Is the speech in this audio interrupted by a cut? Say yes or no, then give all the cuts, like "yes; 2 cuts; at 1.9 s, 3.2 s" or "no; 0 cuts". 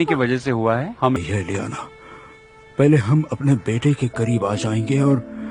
yes; 1 cut; at 1.2 s